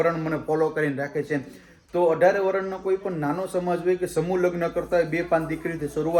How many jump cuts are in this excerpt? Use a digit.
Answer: 0